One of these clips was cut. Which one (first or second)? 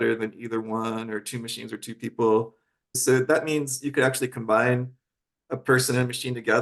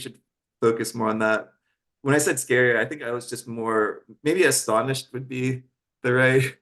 first